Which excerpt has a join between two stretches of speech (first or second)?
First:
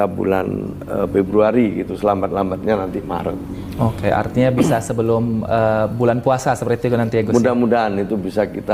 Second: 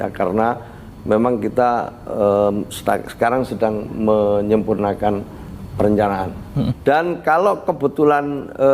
second